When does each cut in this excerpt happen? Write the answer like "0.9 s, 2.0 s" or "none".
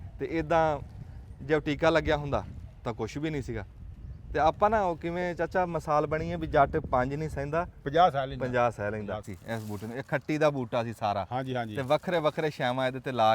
9.3 s